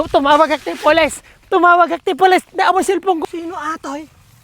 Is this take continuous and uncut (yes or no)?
no